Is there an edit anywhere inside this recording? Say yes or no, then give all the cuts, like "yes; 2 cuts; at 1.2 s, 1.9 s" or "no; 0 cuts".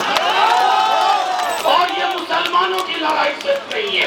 yes; 1 cut; at 1.6 s